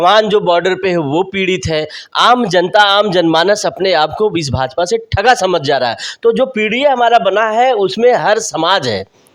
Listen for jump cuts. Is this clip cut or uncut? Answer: uncut